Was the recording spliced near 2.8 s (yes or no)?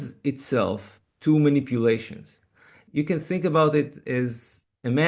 yes